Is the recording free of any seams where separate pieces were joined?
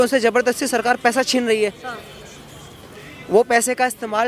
yes; 0 cuts

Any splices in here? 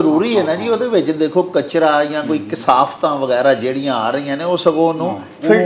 no; 0 cuts

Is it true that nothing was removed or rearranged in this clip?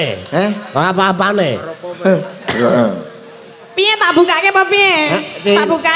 no; 1 cut; at 2.4 s

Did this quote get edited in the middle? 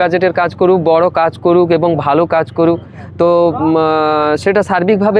no; 0 cuts

